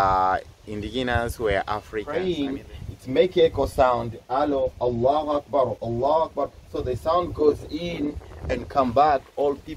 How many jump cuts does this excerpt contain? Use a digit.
1